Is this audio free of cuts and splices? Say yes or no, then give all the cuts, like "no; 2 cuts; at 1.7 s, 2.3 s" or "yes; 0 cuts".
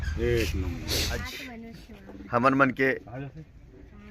no; 1 cut; at 1.2 s